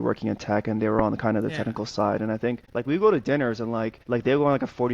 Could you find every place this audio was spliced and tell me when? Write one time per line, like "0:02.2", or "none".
0:02.6
0:04.0

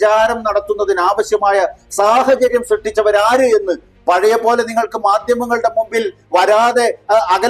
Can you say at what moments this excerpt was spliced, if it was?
0:03.9

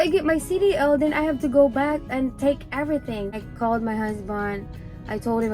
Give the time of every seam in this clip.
0:03.4

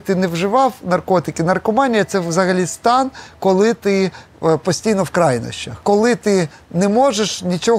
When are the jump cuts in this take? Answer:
0:05.8

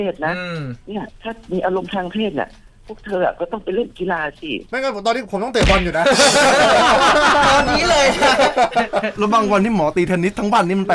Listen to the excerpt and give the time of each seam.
0:01.1
0:04.7
0:09.1

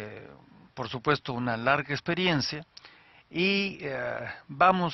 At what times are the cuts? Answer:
0:02.4

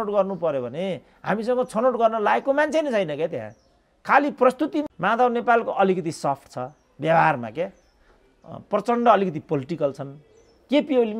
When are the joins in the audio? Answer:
none

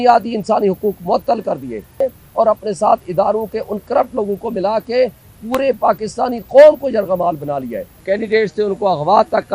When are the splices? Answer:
0:02.0
0:08.0

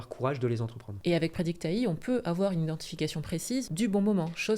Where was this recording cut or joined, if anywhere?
0:00.9
0:03.7

